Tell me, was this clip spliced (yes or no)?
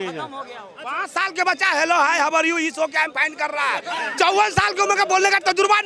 yes